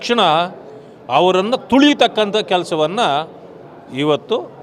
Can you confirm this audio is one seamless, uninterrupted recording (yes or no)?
yes